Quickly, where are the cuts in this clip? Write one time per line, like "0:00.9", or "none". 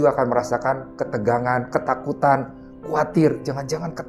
none